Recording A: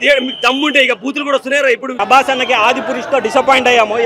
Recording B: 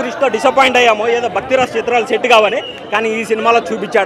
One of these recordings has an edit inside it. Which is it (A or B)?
A